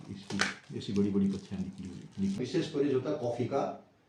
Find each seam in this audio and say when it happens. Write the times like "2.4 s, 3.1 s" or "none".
2.4 s

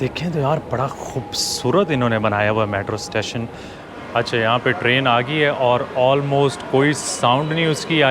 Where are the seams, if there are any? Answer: 3.8 s

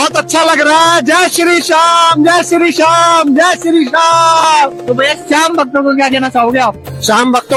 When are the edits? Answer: none

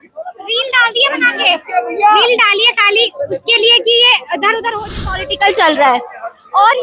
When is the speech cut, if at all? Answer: 5.3 s

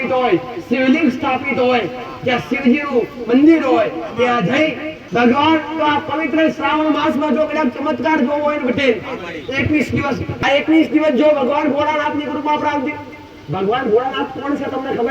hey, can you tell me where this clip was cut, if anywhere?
4.9 s, 10.3 s

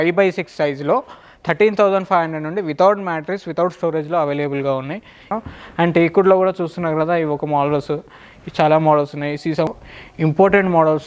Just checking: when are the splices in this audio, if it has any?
5.2 s, 9.7 s

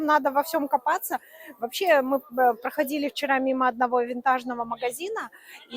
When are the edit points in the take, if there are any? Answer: none

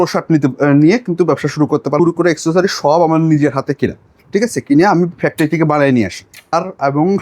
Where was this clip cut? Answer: 2.0 s, 6.5 s

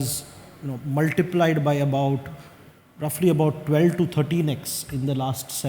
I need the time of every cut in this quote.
none

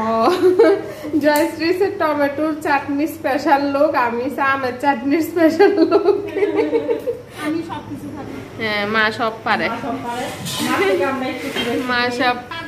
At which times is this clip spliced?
1.0 s, 7.4 s

